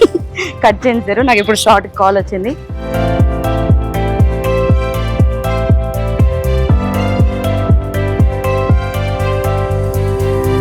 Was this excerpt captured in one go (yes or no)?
no